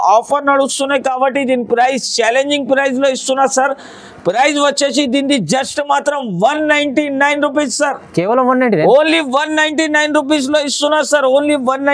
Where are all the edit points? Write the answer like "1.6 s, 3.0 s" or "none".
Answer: none